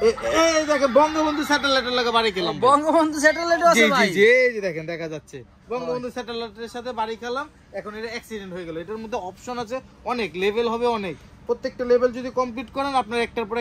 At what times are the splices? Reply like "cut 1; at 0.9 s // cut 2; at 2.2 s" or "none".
none